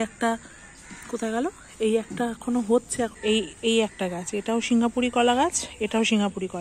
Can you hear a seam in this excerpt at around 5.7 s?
no; 1 cut; at 3.1 s

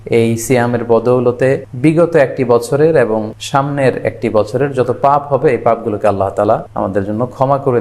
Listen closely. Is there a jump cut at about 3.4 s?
yes; 3 cuts; at 1.7 s, 3.4 s, 6.7 s

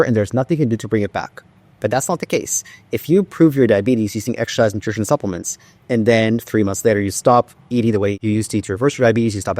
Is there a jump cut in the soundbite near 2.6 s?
no; 1 cut; at 8.2 s

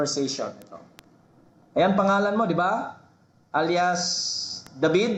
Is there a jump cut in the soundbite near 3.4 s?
no; 0 cuts

